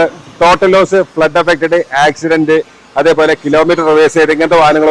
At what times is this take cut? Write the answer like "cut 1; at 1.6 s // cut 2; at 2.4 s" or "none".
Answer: none